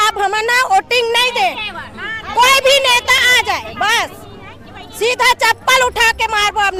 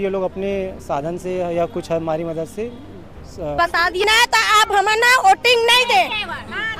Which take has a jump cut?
second; 1 cut; at 3.6 s

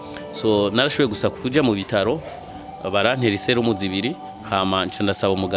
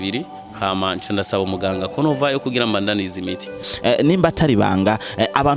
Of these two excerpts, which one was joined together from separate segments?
second; 1 cut; at 3.6 s

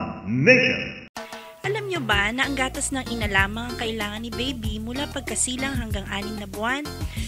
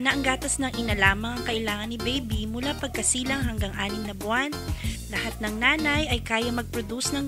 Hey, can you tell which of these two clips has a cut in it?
first; 1 cut; at 1.0 s

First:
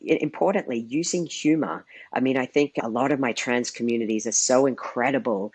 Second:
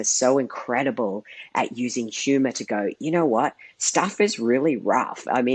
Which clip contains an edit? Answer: first; 1 cut; at 2.8 s

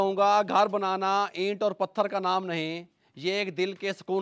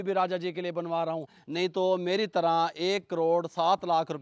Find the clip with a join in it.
second; 1 cut; at 1.4 s

